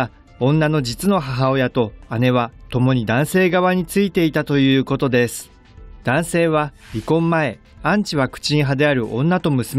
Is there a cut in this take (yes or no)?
no